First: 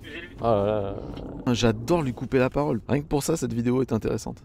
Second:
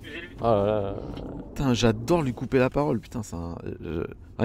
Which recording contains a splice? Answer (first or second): first